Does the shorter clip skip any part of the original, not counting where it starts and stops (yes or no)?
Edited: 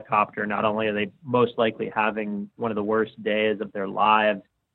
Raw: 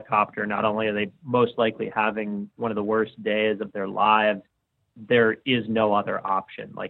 no